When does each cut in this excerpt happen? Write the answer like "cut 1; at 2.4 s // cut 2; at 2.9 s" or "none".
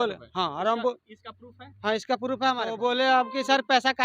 cut 1; at 2.8 s